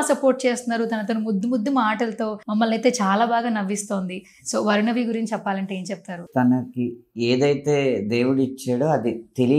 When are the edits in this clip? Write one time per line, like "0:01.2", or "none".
0:02.4
0:06.2